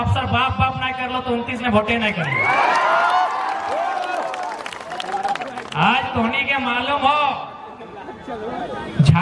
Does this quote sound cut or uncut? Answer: uncut